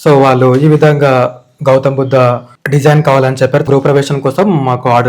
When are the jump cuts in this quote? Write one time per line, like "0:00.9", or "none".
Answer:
0:03.7